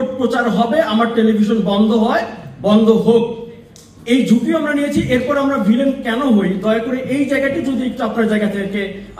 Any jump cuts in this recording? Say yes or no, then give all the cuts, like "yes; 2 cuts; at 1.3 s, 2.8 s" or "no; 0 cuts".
no; 0 cuts